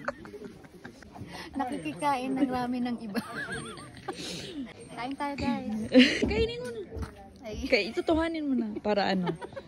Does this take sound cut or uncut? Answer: cut